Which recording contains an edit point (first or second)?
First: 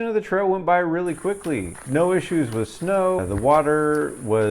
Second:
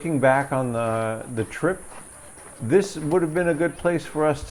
first